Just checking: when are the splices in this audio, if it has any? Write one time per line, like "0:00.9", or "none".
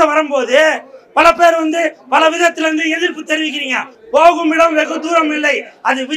0:03.9